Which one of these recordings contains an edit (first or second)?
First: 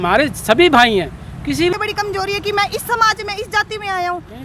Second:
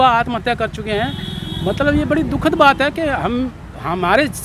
first